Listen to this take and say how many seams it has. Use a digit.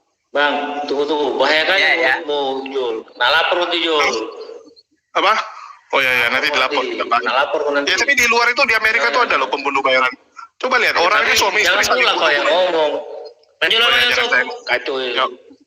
0